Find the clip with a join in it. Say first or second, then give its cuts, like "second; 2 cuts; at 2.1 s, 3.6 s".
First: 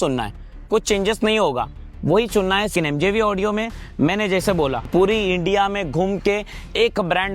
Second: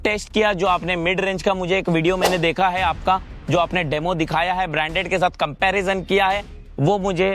first; 2 cuts; at 2.7 s, 4.9 s